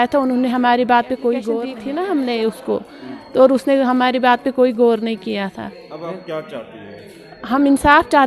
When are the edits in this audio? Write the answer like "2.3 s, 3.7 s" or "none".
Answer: 1.7 s